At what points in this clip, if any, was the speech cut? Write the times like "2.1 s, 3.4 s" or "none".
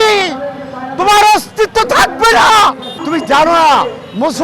2.9 s